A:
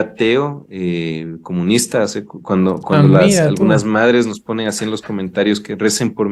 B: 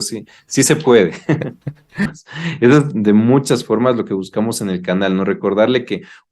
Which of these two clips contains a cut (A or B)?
B